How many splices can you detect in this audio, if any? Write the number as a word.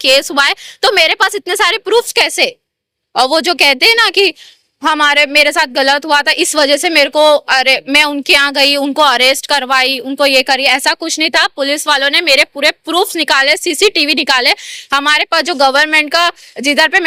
zero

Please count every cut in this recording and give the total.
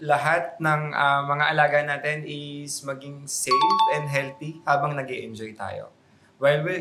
zero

